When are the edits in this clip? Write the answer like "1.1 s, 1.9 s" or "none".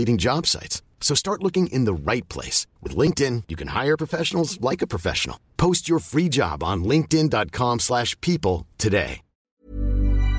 9.5 s